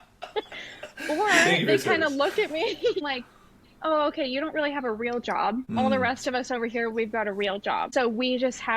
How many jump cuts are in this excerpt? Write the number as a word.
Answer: three